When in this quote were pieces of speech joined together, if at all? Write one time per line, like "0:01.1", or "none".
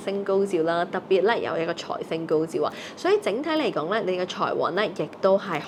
none